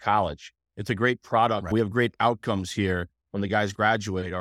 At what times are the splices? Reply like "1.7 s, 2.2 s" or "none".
1.6 s